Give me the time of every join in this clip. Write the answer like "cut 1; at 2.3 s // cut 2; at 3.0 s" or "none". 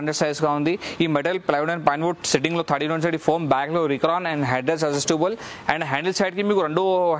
none